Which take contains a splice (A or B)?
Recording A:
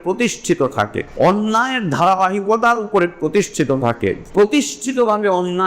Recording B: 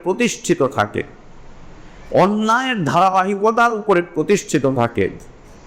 A